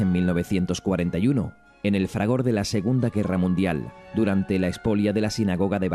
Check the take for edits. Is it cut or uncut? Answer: cut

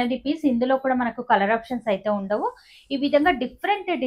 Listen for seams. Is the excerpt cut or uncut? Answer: uncut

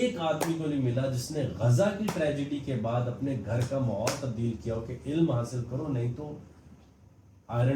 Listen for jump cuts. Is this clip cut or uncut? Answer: uncut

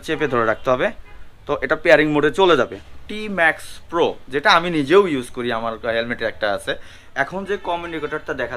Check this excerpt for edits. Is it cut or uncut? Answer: cut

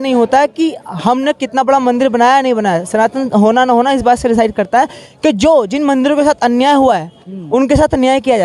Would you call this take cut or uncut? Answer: uncut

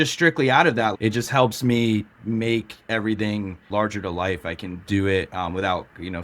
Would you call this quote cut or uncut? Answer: cut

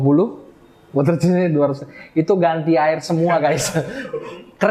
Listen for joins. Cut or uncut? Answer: uncut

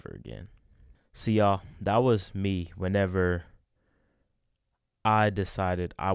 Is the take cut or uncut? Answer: uncut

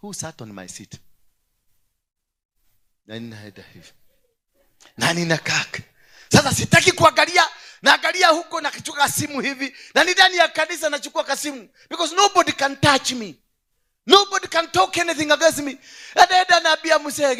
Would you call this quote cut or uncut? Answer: uncut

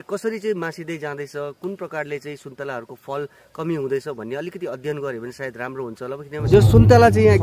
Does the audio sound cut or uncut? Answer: cut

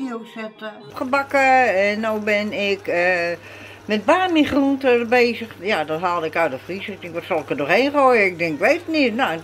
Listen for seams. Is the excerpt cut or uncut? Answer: cut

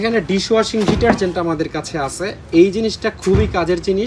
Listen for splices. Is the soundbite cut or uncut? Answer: uncut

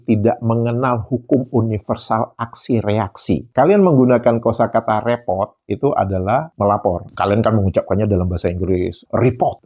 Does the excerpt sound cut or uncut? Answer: cut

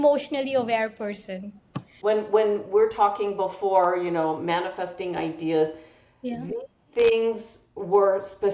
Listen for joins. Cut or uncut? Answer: cut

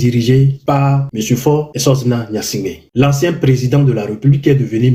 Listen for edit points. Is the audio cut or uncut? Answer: uncut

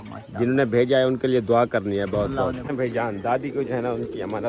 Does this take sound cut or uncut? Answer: cut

